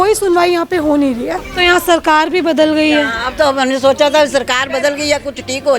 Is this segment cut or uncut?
cut